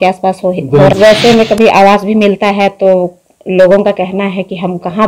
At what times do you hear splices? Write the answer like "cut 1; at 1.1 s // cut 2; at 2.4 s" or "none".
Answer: cut 1; at 0.9 s

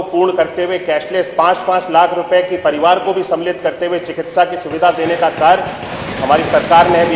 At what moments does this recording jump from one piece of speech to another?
none

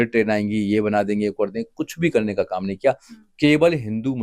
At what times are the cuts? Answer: none

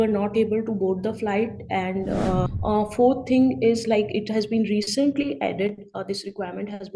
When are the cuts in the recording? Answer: cut 1; at 2.5 s

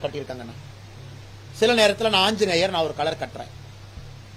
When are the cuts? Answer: none

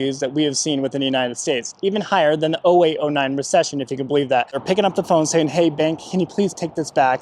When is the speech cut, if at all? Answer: cut 1; at 4.6 s

